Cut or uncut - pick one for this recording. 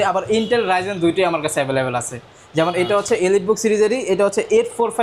uncut